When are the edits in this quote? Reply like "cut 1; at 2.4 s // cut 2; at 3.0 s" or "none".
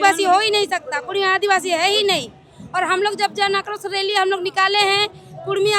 none